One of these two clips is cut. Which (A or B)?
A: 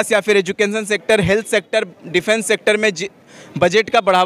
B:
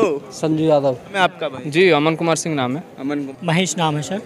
B